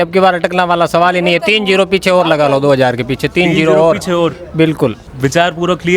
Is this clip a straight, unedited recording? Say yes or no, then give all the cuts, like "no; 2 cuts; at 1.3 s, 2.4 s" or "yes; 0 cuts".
yes; 0 cuts